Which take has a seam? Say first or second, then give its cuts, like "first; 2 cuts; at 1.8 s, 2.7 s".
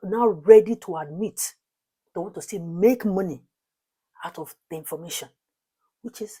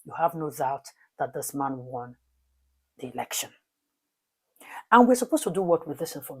second; 1 cut; at 4.0 s